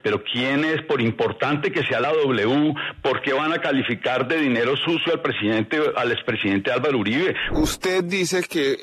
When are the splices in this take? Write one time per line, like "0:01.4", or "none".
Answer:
0:07.4